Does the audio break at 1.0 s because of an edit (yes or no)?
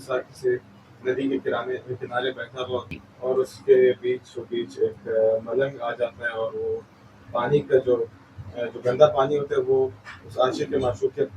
no